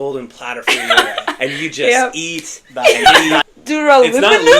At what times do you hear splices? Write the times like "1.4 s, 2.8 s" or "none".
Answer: 3.6 s